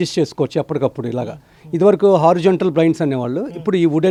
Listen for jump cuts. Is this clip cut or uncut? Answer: uncut